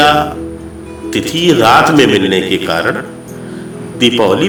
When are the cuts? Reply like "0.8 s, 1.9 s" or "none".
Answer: none